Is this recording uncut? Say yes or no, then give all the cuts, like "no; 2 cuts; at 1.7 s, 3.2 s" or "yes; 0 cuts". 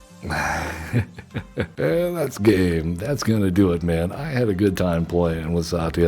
no; 1 cut; at 0.9 s